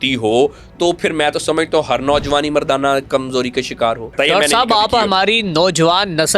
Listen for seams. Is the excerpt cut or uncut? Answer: cut